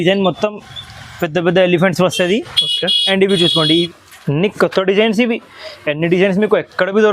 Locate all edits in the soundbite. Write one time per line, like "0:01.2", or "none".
0:03.9